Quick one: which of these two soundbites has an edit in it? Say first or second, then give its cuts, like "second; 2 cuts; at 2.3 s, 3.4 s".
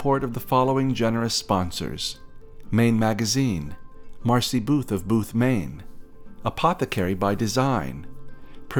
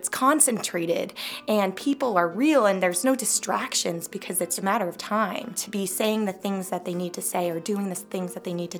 second; 3 cuts; at 3.0 s, 4.6 s, 5.6 s